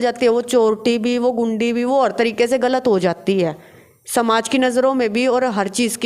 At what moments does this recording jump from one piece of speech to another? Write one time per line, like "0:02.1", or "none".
none